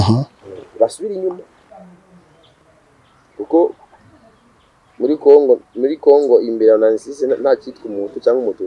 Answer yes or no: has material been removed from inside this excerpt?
no